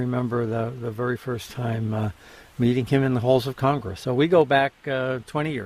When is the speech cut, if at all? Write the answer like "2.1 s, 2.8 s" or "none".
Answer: none